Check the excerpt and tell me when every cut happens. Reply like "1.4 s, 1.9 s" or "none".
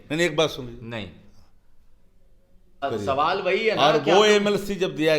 2.8 s